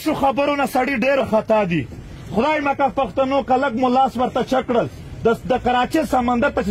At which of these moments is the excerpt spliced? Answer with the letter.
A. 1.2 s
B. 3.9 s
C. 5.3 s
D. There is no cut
A